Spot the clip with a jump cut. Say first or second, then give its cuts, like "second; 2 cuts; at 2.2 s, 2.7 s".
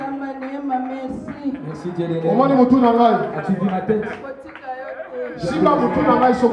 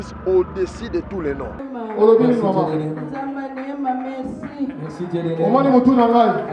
second; 1 cut; at 1.8 s